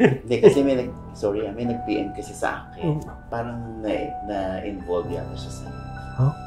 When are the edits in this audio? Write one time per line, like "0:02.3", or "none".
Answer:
none